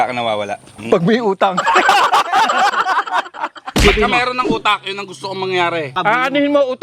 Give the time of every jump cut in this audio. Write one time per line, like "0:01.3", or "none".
none